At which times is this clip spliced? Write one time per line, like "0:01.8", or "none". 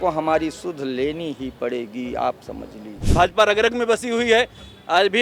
0:03.0